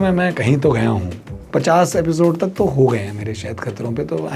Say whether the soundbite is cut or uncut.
cut